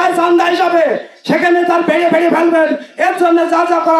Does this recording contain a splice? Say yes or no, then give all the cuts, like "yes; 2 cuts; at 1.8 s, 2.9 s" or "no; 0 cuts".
no; 0 cuts